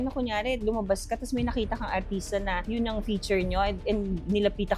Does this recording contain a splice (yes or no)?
no